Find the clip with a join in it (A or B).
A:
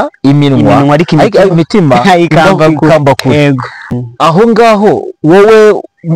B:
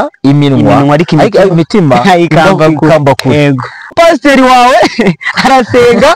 B